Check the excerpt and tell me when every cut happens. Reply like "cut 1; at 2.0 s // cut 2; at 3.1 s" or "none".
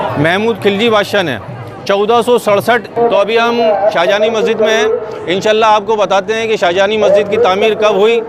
cut 1; at 2.9 s